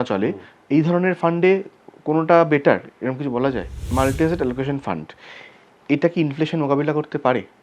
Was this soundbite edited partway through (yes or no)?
yes